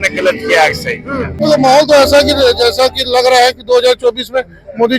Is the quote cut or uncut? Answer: cut